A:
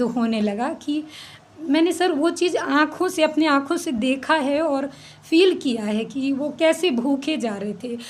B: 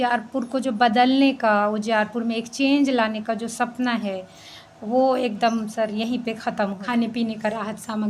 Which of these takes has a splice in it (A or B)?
B